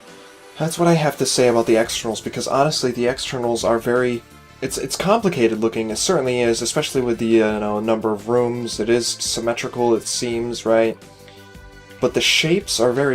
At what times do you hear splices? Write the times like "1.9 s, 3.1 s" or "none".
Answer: 7.2 s

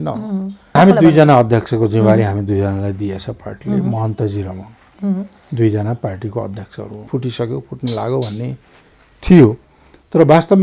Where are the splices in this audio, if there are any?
0.8 s, 7.1 s

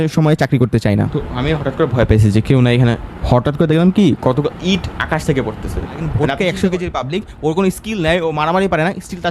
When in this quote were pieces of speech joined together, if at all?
1.1 s, 6.1 s

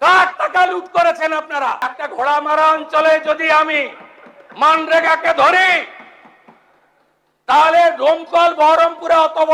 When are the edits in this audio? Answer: 2.0 s

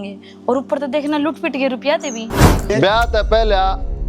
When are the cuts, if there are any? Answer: 2.5 s

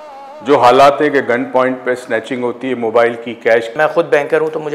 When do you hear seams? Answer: 3.7 s

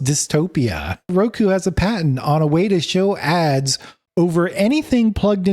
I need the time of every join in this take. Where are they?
1.1 s

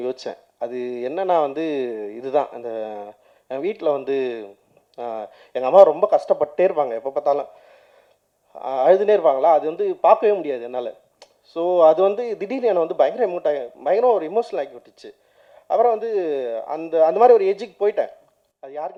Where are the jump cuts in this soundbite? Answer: none

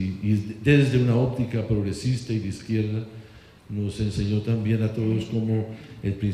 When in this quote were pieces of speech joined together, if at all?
1.5 s

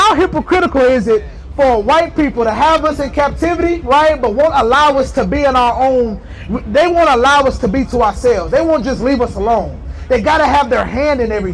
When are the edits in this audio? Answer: none

